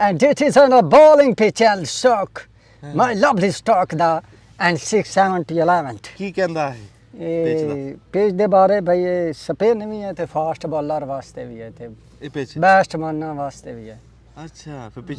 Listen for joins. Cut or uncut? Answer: uncut